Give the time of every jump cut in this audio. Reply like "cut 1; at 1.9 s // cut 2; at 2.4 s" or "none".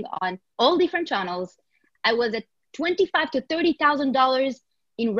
cut 1; at 1.8 s